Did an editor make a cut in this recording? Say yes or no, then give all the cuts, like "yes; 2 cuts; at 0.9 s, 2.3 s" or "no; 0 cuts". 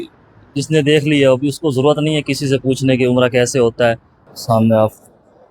yes; 1 cut; at 4.3 s